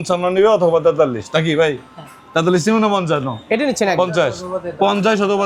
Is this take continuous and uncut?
yes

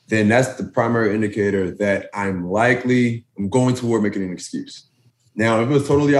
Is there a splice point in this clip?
yes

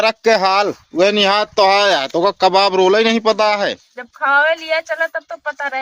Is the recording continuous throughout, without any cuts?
yes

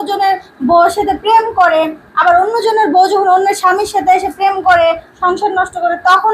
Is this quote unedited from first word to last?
yes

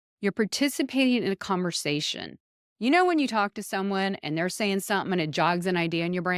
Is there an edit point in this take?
no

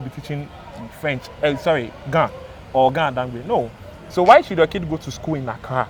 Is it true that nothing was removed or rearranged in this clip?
yes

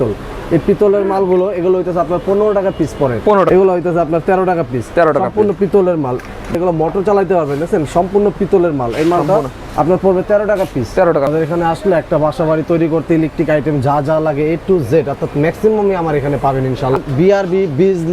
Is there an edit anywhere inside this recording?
yes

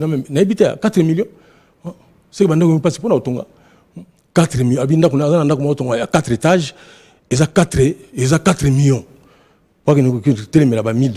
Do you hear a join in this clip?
no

